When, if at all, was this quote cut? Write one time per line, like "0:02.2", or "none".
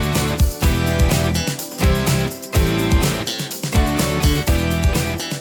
none